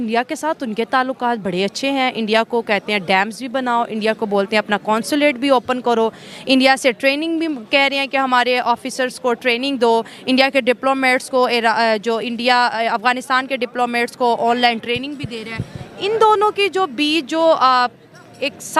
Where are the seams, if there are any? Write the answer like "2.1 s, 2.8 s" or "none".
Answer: none